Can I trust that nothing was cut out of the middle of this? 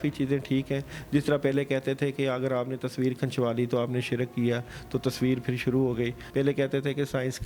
no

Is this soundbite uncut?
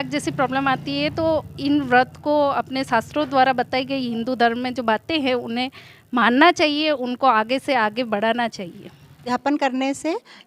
no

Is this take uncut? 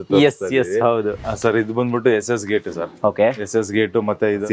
no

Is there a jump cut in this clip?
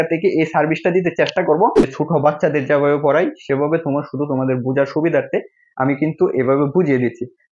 yes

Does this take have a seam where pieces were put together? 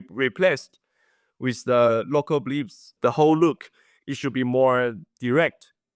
yes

